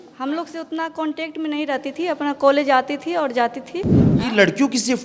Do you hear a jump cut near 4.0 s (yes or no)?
yes